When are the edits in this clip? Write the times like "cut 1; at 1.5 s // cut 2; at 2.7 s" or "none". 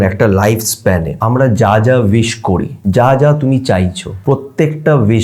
cut 1; at 1.1 s // cut 2; at 2.7 s // cut 3; at 4.1 s